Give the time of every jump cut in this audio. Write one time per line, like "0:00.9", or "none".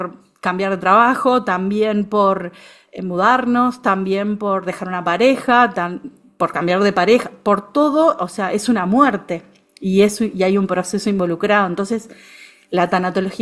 none